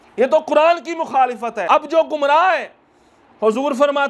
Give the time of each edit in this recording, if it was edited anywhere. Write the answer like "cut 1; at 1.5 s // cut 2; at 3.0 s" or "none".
cut 1; at 1.5 s